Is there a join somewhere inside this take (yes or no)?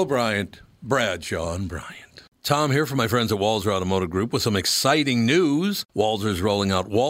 yes